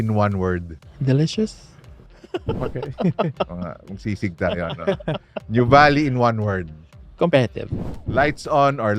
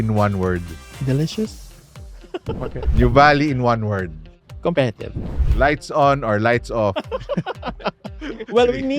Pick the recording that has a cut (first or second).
second